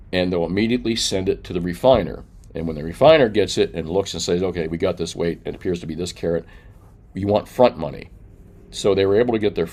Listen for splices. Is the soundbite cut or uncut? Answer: uncut